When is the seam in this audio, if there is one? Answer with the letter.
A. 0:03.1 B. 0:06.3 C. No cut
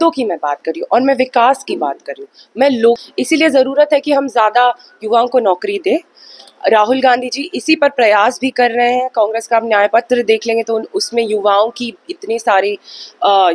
A